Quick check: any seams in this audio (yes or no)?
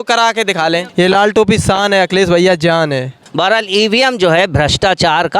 yes